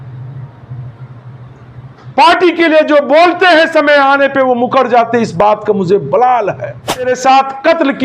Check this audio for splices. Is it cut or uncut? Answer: cut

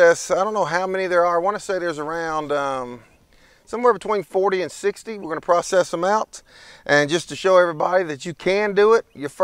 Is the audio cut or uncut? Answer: uncut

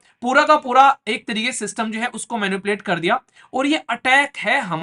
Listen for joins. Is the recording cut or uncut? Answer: uncut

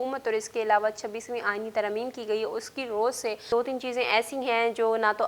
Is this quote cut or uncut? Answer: cut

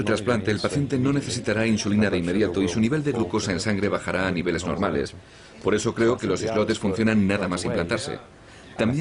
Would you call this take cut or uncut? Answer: uncut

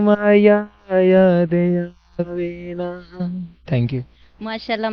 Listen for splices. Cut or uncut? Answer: cut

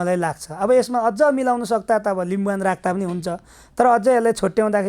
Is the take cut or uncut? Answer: uncut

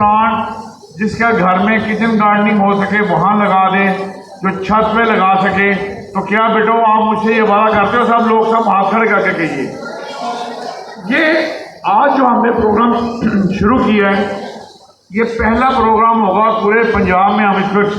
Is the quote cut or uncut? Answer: uncut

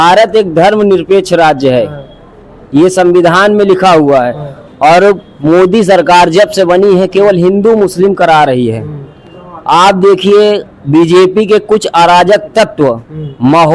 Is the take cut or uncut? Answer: uncut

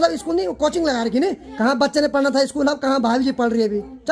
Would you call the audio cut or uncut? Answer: cut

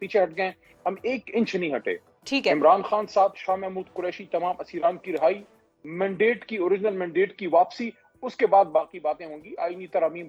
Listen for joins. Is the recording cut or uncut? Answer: uncut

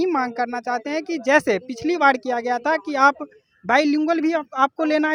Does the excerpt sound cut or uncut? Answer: uncut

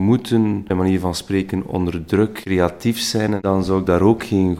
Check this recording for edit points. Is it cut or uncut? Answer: cut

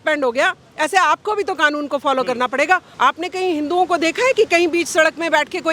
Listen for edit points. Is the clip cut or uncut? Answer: cut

